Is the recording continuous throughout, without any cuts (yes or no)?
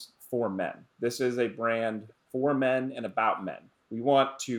yes